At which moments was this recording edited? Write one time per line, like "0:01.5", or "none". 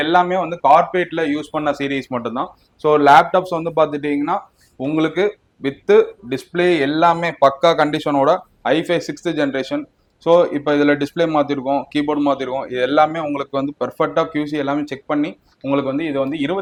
none

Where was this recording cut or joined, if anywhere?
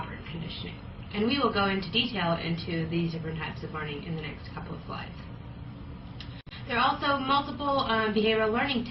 0:06.5

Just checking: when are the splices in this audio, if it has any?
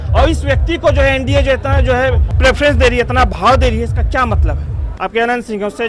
0:02.3
0:04.9

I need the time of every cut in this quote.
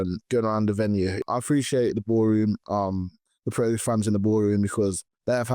0:01.2

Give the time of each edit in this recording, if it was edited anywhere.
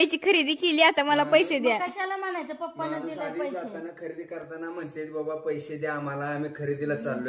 none

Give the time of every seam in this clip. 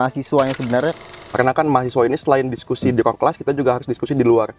0:01.0

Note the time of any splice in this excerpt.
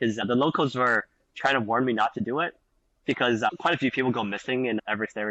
none

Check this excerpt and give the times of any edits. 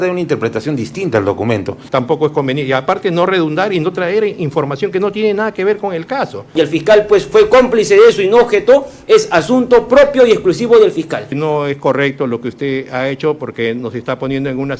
0:01.8
0:06.5
0:11.3

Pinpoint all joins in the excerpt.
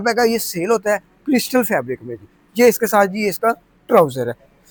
none

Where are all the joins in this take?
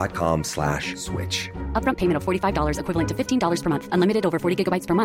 none

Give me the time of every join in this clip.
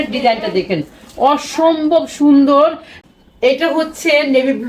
0:02.9

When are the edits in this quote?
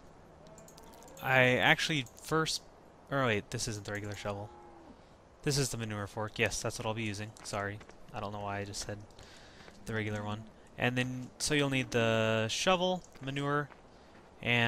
0:07.8

